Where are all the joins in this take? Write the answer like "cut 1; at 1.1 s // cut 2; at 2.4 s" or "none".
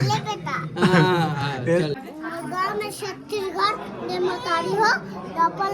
cut 1; at 2.0 s